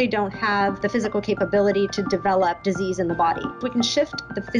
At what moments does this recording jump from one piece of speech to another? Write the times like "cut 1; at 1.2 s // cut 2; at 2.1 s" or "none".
cut 1; at 0.8 s // cut 2; at 2.6 s // cut 3; at 3.5 s